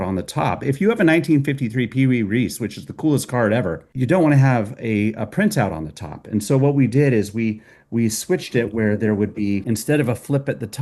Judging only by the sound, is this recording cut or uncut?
cut